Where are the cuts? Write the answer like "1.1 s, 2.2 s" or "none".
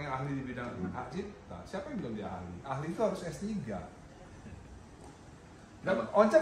none